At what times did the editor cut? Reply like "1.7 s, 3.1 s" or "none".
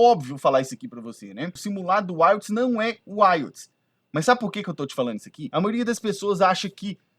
1.6 s, 5.3 s